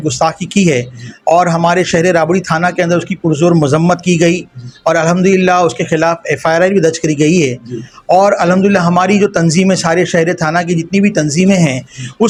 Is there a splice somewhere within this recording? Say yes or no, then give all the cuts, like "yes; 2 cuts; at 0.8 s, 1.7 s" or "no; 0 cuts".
no; 0 cuts